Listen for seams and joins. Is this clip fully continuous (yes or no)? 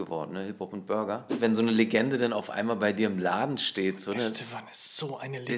no